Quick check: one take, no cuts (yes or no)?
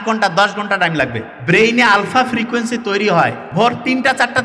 no